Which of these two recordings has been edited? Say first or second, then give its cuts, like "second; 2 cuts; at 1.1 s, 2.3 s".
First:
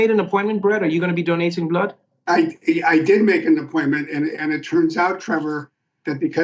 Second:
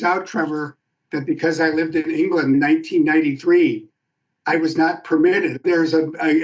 second; 2 cuts; at 2.6 s, 5.6 s